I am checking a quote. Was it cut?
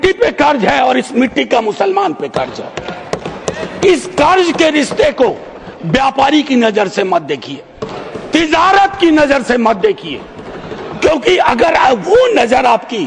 no; 0 cuts

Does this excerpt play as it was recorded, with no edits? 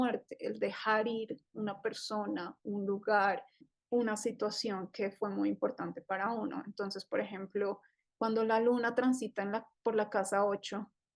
no; 1 cut; at 3.7 s

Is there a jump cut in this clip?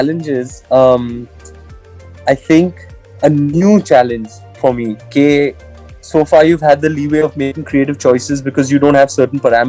no; 0 cuts

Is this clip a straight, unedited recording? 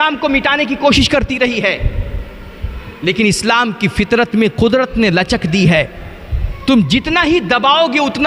yes; 0 cuts

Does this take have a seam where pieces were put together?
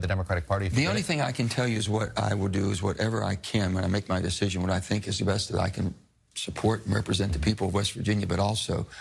no; 0 cuts

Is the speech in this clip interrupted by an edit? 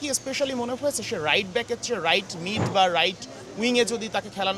no; 0 cuts

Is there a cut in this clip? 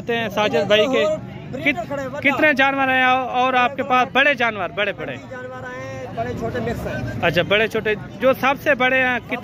no; 0 cuts

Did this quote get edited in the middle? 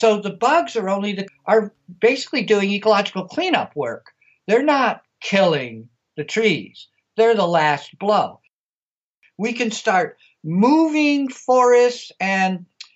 yes; 2 cuts; at 1.3 s, 8.9 s

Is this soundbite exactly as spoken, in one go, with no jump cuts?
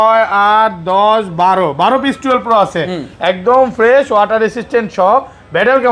yes; 0 cuts

